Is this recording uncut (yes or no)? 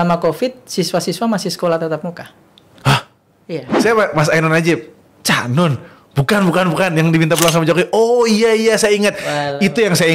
no